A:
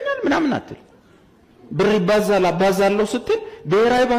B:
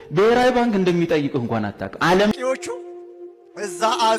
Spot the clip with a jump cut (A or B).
B